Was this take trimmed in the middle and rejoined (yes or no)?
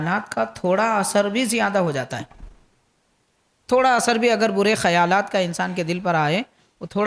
no